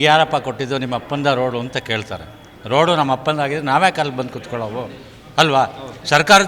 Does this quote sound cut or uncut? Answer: uncut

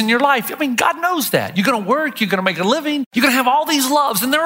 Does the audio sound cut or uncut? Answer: cut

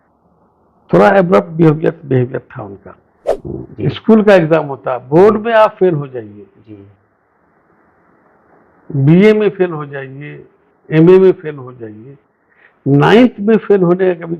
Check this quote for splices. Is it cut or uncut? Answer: cut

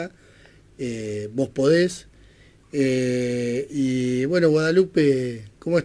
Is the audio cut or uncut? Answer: uncut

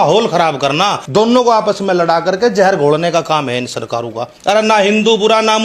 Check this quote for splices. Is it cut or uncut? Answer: cut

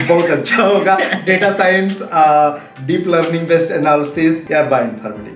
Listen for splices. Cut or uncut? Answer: cut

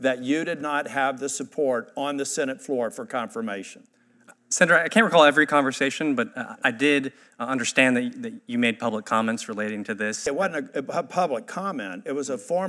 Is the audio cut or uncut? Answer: cut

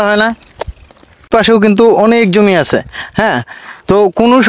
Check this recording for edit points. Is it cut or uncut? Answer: cut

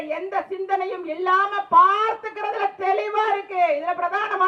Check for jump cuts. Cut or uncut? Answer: uncut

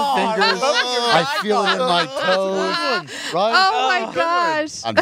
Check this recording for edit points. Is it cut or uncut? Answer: uncut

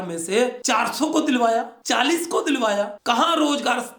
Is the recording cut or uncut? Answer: cut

